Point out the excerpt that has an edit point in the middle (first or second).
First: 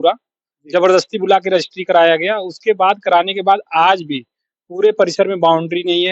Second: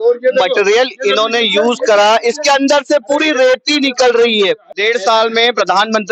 second